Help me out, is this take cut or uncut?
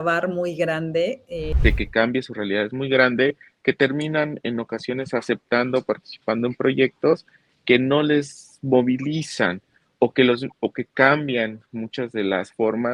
cut